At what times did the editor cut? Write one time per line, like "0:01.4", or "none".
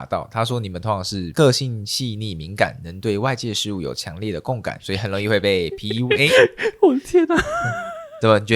0:01.3
0:04.7

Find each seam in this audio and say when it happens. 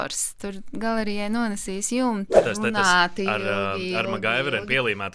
0:02.4

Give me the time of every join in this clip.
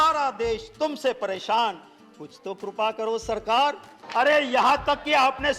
0:04.0

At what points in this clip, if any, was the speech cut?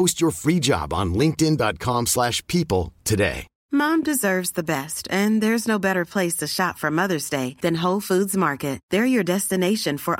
0:03.5

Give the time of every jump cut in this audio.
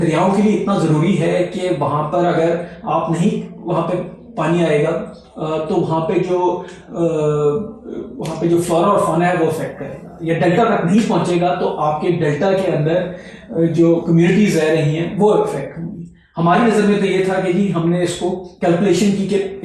none

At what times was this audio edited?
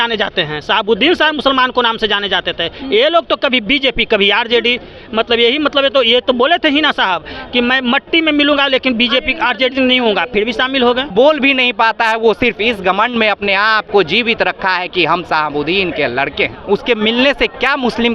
0:11.1
0:16.6

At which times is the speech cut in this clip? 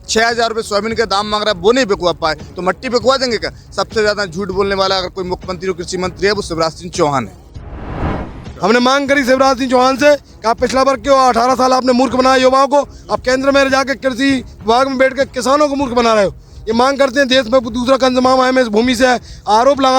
0:08.0

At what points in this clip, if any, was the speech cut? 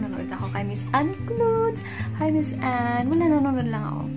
none

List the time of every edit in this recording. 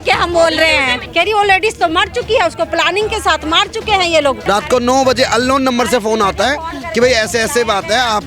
0:01.0
0:04.4

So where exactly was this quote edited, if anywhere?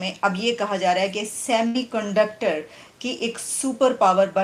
none

